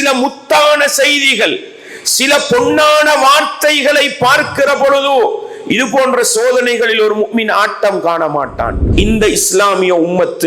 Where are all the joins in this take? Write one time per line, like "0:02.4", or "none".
0:08.8